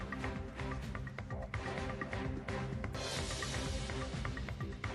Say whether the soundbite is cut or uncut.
cut